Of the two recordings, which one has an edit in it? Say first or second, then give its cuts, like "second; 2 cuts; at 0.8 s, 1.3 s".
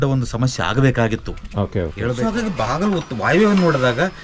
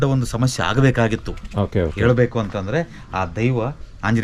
first; 1 cut; at 2.0 s